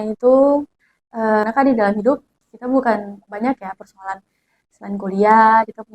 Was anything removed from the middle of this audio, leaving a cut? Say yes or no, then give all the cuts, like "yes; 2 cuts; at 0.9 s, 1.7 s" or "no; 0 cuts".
yes; 1 cut; at 1.4 s